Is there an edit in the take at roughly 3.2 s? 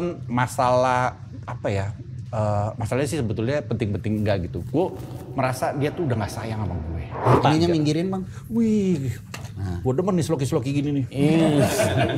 no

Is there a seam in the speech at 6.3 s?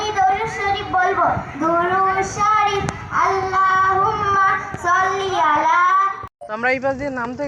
yes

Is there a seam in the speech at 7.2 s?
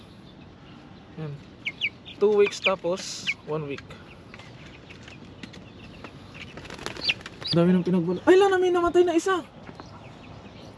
yes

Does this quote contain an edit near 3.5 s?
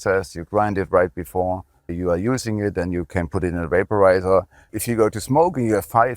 no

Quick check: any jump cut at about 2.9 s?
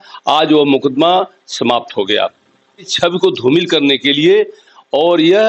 yes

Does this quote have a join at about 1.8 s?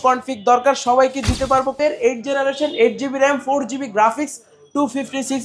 yes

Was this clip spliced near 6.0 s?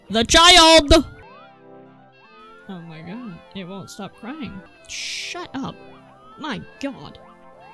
no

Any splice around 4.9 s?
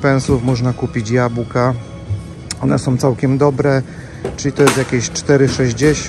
no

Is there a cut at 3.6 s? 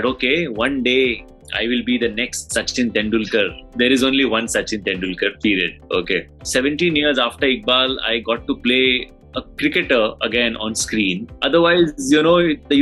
yes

